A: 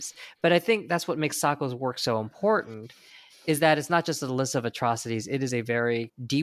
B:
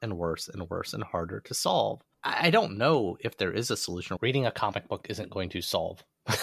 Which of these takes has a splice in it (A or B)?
B